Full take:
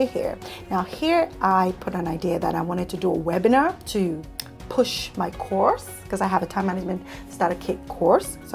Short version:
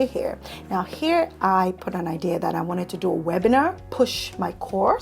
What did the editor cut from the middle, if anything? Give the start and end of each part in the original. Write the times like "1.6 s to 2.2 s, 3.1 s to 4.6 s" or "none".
3.8 s to 4.6 s